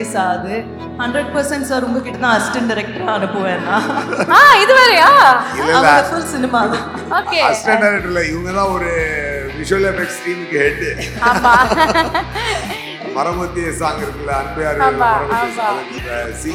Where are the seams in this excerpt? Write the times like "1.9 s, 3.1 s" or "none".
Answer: none